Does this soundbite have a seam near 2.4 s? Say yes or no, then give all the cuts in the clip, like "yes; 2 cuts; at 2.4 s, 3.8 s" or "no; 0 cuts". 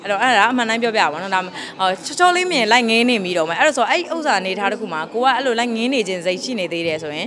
no; 0 cuts